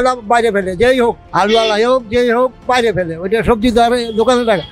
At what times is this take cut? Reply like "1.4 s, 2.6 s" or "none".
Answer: 1.2 s

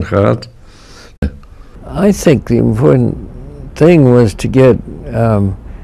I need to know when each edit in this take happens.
none

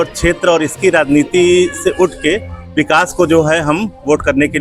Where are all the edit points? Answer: none

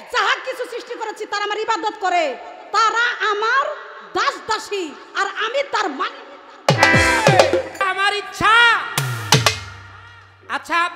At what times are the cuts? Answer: 7.8 s

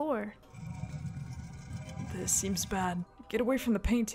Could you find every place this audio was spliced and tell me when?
2.1 s, 3.2 s

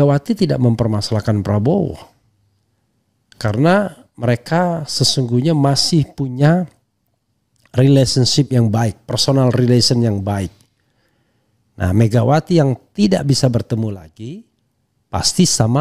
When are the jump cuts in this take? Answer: none

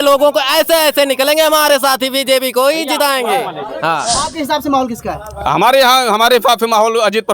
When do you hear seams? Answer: 4.2 s

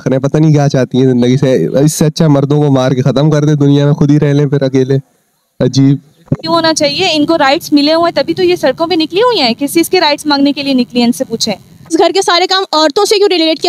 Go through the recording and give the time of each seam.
6.4 s, 11.9 s

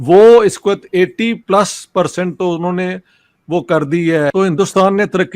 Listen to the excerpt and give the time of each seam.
4.3 s

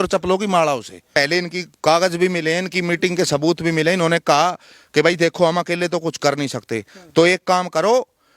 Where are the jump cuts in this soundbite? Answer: 1.1 s

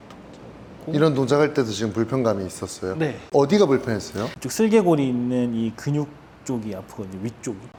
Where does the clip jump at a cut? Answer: none

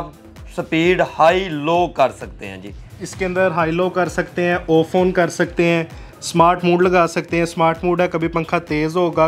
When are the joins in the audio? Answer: none

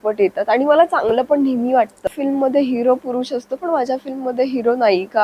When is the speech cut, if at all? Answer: 2.1 s

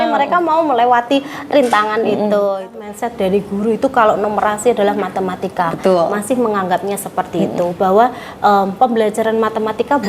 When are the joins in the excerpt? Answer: 2.8 s

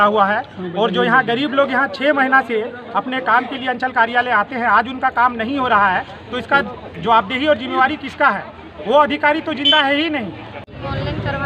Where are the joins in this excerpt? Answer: 10.5 s

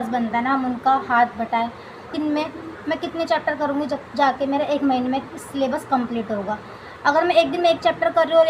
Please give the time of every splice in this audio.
2.1 s

